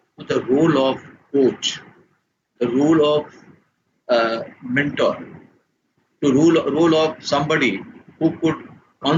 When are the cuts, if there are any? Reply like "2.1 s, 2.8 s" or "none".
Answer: none